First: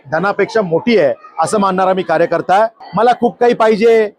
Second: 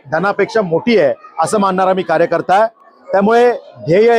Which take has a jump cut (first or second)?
first